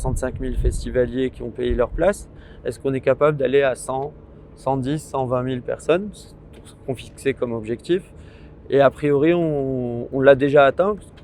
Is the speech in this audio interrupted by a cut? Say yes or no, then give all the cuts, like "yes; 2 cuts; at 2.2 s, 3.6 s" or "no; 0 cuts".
no; 0 cuts